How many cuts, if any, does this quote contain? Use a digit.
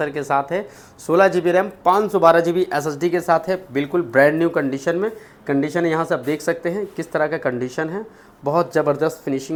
0